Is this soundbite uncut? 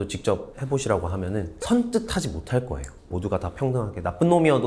no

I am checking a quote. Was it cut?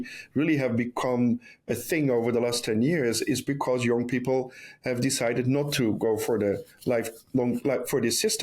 no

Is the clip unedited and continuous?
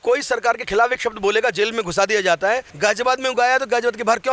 no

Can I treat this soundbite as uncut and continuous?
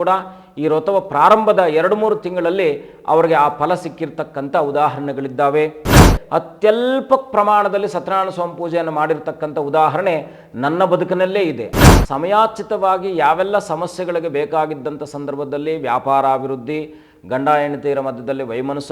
no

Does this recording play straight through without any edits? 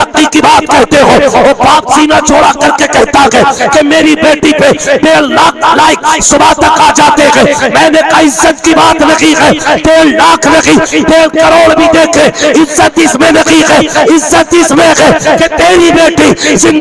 yes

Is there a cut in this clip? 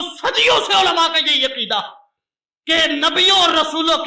no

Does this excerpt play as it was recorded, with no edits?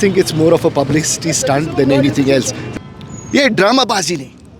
no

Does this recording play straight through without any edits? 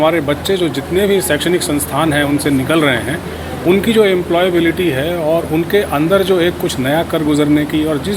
yes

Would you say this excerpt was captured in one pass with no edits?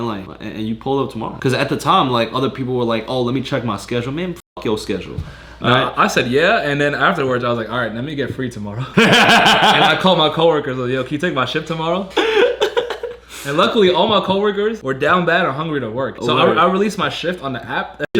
yes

